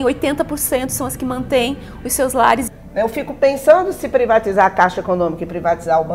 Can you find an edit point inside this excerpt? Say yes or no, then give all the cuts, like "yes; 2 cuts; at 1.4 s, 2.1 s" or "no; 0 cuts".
yes; 1 cut; at 2.8 s